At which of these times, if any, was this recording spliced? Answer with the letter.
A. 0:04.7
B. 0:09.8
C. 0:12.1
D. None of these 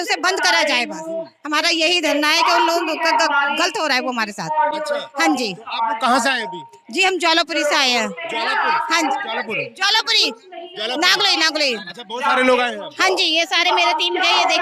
D